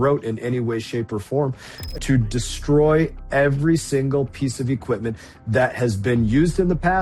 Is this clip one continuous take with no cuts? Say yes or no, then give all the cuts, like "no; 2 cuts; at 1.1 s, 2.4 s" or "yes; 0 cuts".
no; 1 cut; at 1.8 s